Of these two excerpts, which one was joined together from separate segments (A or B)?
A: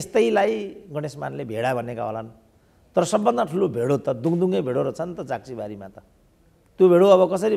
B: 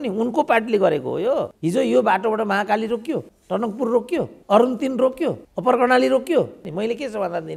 B